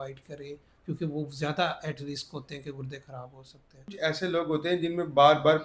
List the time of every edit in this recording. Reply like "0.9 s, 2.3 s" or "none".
3.9 s